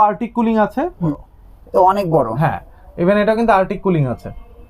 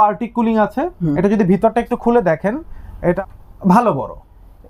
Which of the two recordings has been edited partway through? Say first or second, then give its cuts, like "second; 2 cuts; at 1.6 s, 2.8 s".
first; 1 cut; at 1.1 s